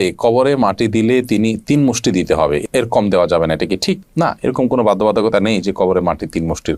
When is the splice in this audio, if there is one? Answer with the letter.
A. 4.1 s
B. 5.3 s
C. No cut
C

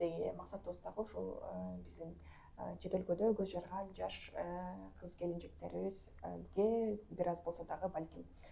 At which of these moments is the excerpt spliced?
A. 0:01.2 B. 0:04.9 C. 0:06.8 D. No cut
D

